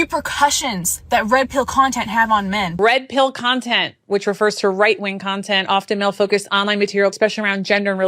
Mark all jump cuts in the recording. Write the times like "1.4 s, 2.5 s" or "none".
2.8 s, 7.1 s